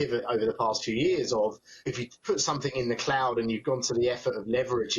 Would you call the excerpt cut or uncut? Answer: cut